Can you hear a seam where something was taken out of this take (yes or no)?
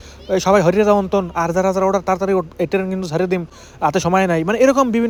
no